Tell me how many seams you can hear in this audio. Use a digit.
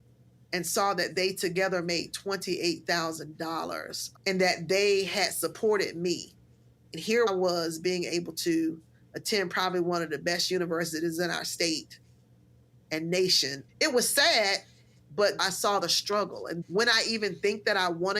1